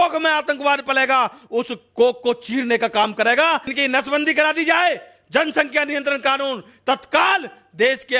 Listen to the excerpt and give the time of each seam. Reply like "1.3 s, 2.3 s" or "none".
3.7 s